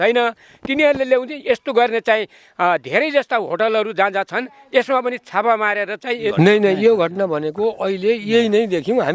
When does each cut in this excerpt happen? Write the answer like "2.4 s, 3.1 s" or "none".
6.1 s